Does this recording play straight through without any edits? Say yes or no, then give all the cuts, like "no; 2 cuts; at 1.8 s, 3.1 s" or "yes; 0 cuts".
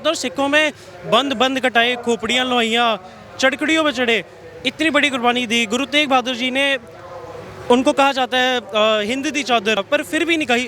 no; 1 cut; at 9.8 s